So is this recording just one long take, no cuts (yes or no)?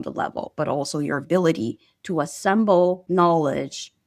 no